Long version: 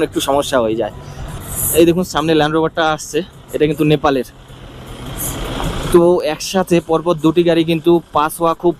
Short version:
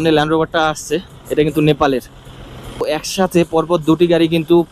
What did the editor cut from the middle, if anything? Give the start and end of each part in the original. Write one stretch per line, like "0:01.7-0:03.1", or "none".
0:05.0-0:06.2